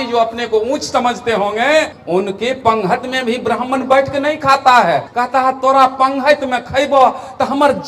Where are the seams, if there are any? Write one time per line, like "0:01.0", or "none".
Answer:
0:02.0
0:05.1

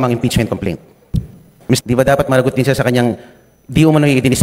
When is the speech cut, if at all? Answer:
0:01.4

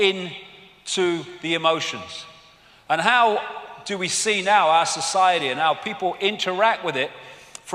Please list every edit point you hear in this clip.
0:05.5

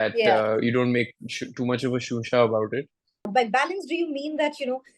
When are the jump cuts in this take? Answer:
0:03.3

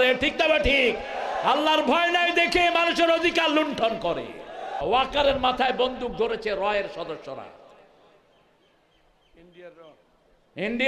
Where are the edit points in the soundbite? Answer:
0:04.7

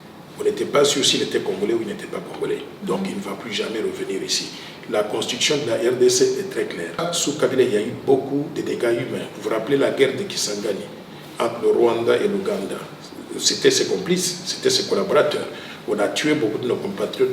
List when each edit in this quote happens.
0:07.1

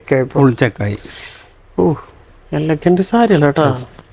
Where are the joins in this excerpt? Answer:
none

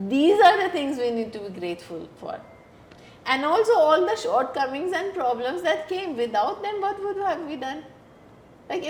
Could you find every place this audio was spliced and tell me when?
none

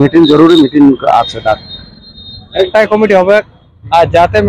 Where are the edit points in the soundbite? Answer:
0:02.7

